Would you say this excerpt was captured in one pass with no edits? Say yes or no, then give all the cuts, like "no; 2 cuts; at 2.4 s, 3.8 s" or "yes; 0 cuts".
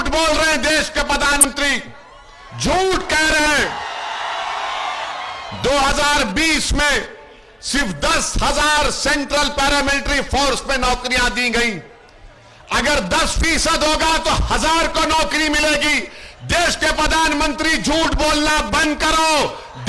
no; 1 cut; at 1.4 s